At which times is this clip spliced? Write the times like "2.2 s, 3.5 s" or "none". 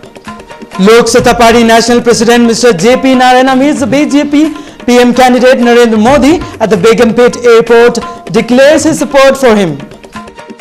none